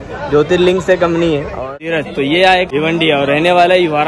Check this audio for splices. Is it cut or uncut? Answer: cut